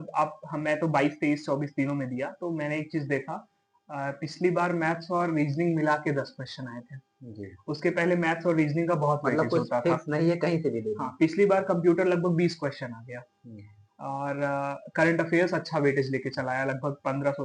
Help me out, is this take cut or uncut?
uncut